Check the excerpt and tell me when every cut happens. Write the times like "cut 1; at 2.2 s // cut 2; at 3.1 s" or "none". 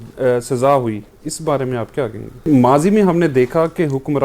cut 1; at 2.5 s